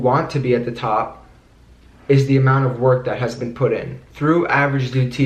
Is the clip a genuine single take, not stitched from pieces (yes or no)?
no